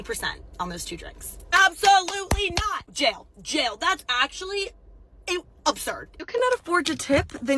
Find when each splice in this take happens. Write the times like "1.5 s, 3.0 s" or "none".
2.8 s, 6.1 s